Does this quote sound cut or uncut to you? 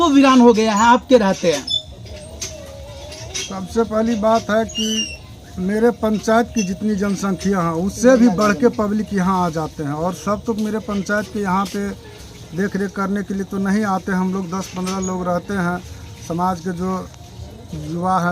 uncut